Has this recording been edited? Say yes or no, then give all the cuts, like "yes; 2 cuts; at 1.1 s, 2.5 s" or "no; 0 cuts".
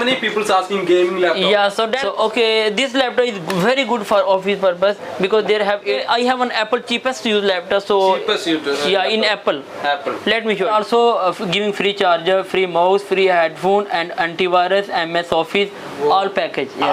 yes; 3 cuts; at 2.0 s, 5.8 s, 10.6 s